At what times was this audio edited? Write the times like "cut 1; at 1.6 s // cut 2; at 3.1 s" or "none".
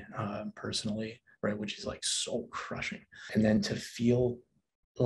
cut 1; at 3.5 s